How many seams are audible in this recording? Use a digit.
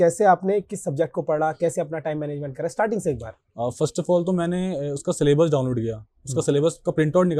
0